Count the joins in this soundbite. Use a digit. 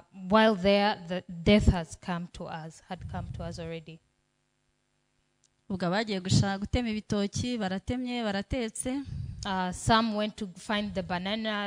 0